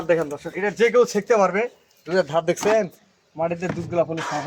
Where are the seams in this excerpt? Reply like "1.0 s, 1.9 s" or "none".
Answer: none